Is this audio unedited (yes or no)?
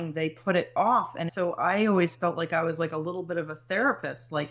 no